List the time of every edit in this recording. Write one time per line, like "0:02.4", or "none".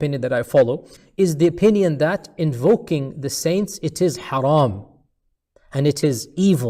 0:01.0

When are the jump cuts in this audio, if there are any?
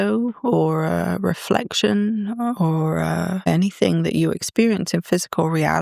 none

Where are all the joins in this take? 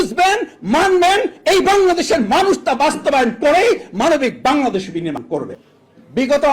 0:05.3

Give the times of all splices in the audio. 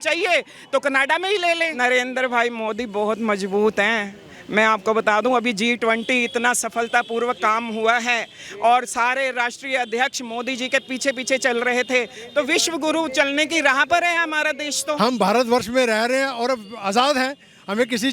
0:01.7
0:15.0

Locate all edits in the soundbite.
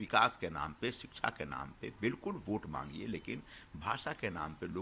none

